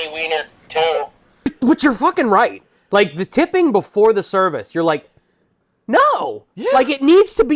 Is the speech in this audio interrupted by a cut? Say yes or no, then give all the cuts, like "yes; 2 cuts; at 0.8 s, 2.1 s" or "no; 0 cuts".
yes; 1 cut; at 1.5 s